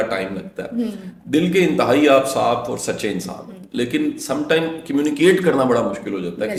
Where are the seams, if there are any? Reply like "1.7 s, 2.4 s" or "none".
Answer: none